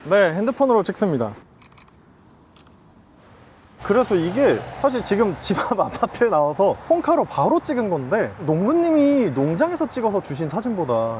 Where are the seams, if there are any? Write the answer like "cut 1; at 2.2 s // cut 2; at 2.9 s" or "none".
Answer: none

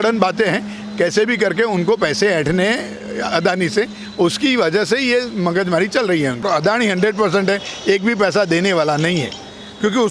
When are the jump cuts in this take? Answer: cut 1; at 6.4 s

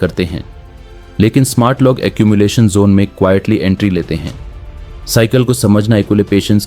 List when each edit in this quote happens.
none

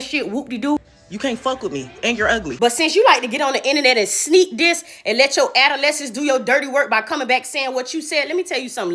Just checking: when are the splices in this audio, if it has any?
cut 1; at 0.9 s // cut 2; at 2.5 s

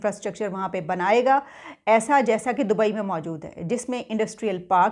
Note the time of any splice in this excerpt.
none

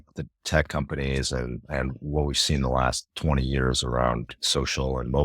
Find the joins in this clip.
cut 1; at 4.4 s

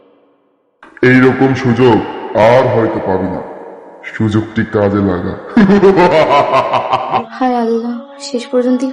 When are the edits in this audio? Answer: cut 1; at 7.2 s

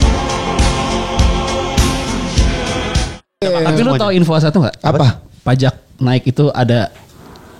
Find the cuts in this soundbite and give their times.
cut 1; at 3.2 s

